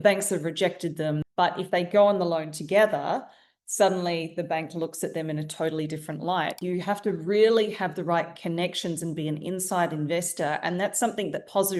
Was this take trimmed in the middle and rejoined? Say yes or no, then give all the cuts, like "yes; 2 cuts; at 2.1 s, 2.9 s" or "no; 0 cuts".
yes; 2 cuts; at 1.2 s, 6.6 s